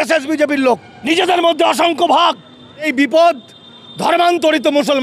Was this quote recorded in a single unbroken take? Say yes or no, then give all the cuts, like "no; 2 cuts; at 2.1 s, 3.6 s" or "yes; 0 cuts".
no; 2 cuts; at 0.9 s, 2.9 s